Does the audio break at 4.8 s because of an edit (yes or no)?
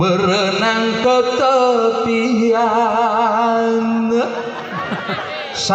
no